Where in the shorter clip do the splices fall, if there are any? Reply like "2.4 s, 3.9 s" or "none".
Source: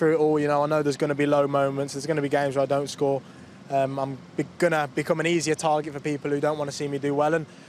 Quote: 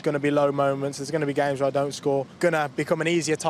2.3 s